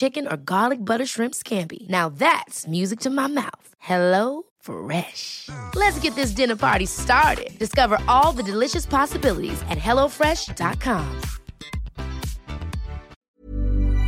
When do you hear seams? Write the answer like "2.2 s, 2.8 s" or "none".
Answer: 13.2 s